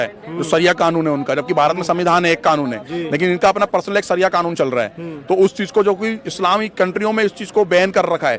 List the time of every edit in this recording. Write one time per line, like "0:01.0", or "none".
none